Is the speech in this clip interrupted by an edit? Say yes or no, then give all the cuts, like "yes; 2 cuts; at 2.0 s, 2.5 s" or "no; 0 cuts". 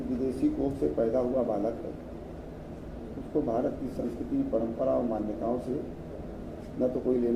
no; 0 cuts